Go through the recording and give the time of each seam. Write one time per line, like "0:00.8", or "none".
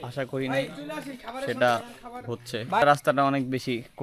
0:02.8